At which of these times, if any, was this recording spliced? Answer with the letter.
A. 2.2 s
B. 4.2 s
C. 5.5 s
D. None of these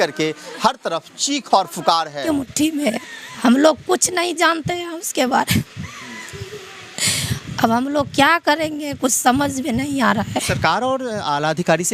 A